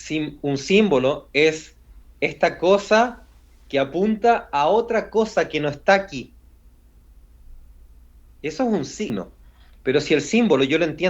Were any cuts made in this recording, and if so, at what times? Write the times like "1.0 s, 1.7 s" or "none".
9.1 s